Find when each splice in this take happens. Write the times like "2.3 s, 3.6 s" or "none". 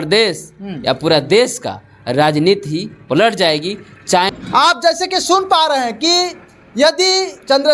4.3 s